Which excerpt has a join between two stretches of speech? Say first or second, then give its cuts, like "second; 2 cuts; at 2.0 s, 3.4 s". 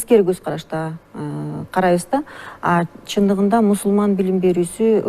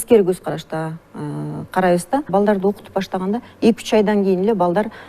second; 1 cut; at 2.3 s